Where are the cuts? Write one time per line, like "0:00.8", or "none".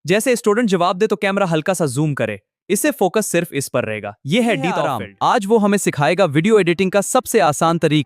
0:05.0